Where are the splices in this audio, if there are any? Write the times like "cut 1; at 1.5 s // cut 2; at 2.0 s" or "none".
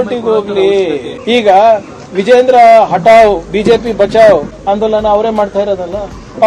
cut 1; at 1.1 s // cut 2; at 4.5 s